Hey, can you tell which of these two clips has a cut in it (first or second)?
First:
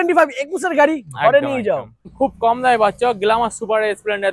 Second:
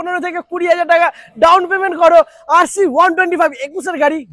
first